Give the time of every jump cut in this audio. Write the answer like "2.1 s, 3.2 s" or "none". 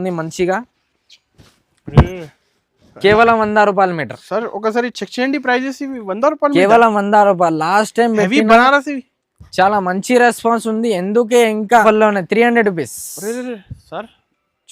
11.8 s

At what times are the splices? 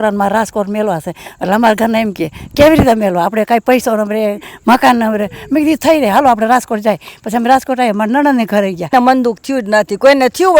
8.9 s

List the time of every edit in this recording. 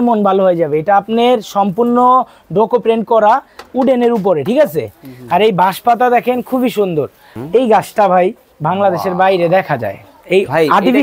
7.2 s

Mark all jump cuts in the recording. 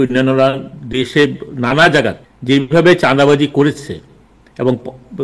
2.3 s

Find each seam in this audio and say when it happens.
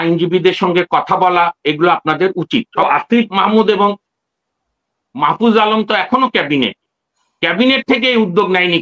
2.8 s

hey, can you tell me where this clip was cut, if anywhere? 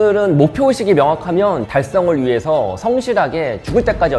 1.7 s

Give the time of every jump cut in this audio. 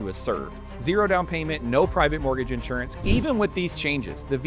2.9 s

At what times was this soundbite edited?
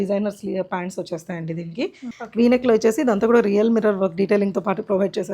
2.1 s

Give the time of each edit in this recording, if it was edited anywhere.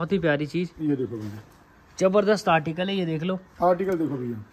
none

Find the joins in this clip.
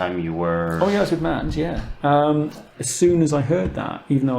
2.8 s

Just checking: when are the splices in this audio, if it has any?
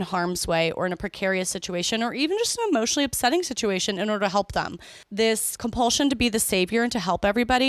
5.2 s

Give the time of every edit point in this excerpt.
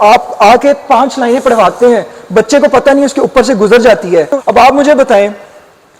4.4 s

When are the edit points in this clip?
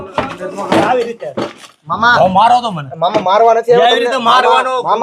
none

